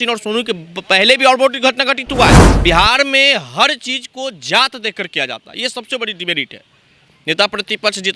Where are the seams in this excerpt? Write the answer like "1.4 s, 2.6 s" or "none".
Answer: 2.5 s